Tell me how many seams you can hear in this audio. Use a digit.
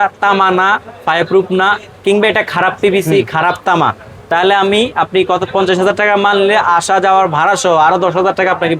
0